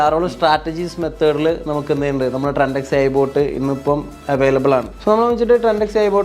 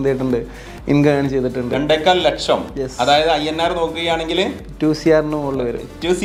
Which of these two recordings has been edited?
first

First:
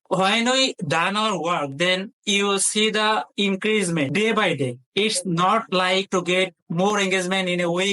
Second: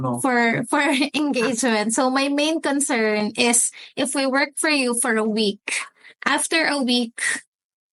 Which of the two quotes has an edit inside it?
first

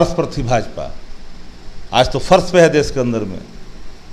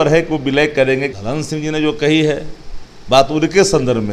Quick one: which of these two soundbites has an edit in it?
second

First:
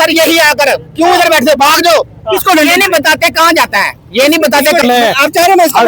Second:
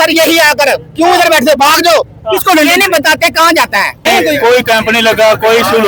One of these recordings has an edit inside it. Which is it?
first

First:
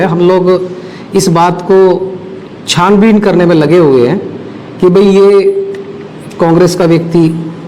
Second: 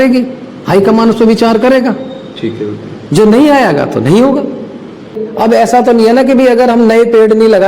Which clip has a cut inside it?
second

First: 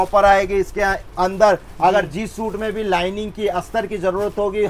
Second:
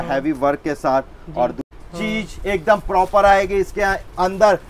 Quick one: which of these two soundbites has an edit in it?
second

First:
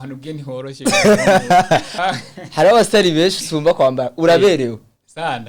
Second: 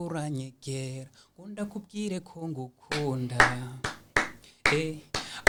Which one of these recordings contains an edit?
first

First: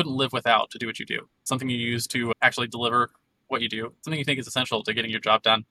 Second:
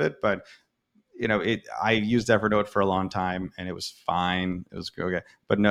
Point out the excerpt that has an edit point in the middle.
first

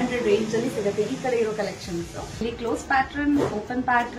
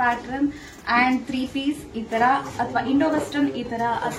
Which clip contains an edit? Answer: first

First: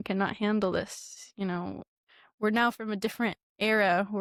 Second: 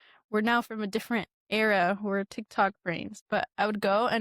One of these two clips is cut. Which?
second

